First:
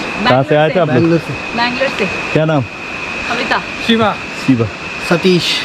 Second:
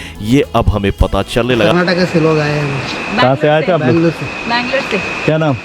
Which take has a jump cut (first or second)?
second